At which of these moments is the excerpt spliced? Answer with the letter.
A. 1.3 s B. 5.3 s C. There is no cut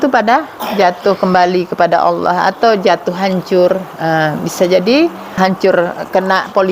B